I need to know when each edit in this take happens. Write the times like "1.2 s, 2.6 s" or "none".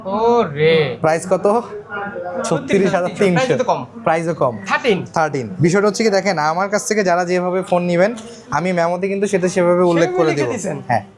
none